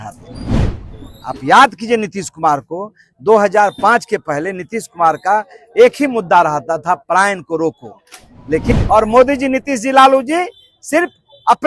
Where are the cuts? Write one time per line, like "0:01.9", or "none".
0:08.7